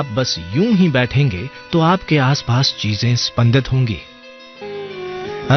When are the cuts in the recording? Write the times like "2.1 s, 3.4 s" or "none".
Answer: 4.5 s